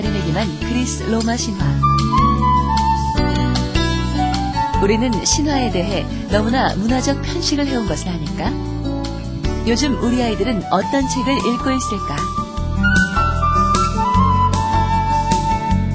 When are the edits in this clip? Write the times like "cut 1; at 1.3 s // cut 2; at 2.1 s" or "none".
cut 1; at 13.5 s